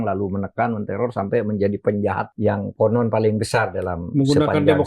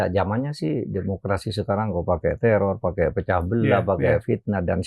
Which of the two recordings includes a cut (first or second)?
first